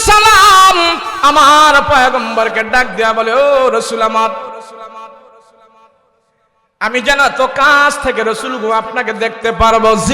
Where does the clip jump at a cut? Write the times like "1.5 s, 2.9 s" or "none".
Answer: 1.1 s